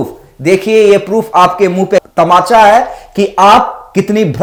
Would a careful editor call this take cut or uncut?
uncut